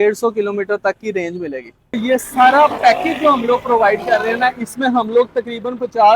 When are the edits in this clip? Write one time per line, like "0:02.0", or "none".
0:02.0